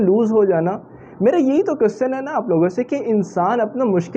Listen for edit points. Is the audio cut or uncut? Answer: uncut